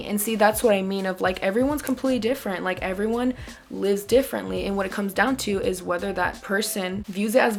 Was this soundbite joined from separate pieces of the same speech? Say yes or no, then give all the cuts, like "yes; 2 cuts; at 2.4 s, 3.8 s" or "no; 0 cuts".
no; 0 cuts